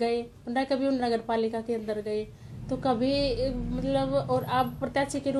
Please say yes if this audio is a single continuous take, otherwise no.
yes